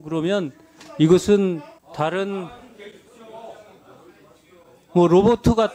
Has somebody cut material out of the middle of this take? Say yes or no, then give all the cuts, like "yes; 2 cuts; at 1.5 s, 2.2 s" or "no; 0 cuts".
yes; 1 cut; at 1.8 s